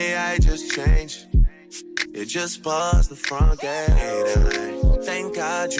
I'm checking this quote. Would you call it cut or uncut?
uncut